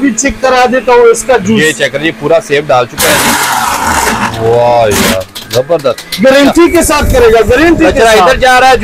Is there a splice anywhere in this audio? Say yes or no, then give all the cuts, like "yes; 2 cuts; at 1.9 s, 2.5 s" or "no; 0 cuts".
no; 0 cuts